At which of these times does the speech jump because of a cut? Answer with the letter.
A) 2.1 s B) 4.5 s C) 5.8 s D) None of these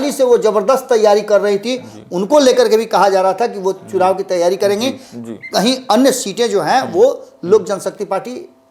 D